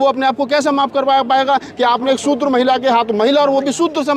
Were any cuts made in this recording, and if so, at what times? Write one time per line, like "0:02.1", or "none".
none